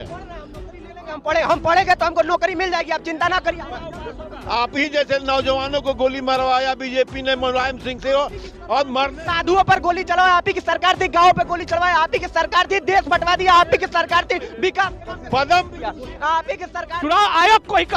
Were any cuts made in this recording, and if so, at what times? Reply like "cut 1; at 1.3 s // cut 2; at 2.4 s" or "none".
cut 1; at 16.7 s